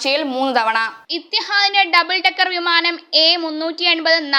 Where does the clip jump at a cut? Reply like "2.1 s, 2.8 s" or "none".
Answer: none